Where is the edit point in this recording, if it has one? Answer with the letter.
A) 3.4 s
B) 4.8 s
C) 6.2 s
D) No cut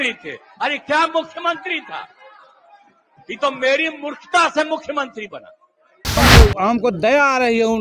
C